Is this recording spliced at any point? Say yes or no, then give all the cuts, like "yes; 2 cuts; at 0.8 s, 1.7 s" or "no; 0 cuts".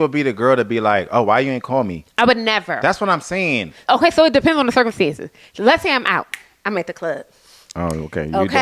yes; 1 cut; at 3.8 s